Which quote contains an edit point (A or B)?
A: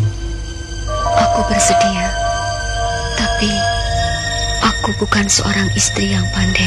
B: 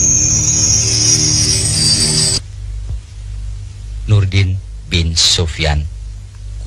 B